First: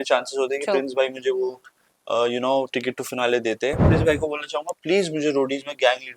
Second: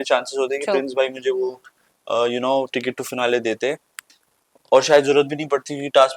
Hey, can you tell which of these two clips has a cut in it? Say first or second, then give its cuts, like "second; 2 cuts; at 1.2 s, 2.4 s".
first; 1 cut; at 3.9 s